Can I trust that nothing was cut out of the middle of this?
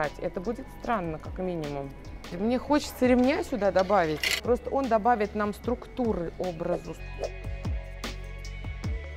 yes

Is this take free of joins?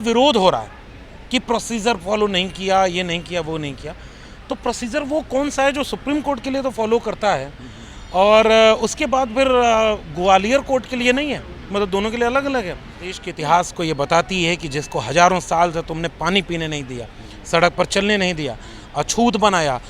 no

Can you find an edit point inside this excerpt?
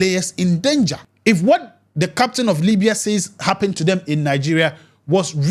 yes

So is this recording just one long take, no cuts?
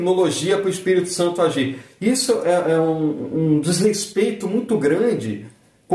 yes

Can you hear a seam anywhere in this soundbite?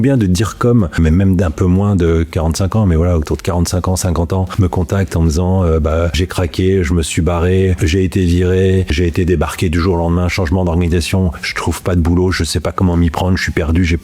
yes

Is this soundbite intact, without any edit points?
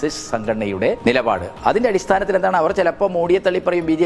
no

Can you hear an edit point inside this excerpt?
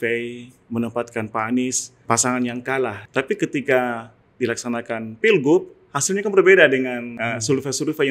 yes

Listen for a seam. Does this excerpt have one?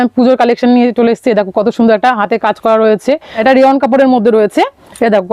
yes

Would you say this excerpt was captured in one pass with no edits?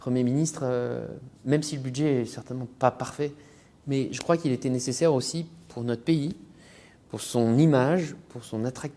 yes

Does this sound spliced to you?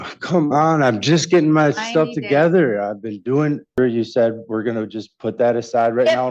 yes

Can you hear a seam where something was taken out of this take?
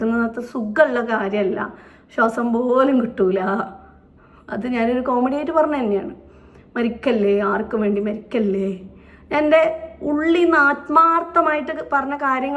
no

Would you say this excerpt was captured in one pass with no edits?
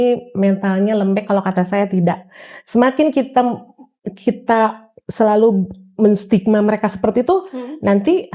yes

